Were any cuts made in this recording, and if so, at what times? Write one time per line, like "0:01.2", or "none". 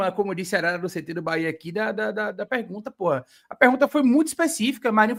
none